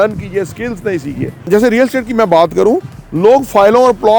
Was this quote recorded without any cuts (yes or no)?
no